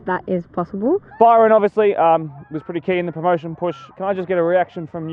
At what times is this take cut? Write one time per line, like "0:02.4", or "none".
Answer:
0:01.1
0:03.9